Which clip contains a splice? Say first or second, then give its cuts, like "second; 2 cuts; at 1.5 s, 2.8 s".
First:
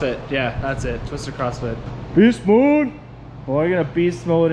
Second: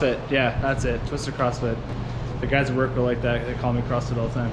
first; 1 cut; at 1.9 s